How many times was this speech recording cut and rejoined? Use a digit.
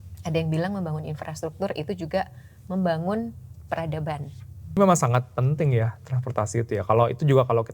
1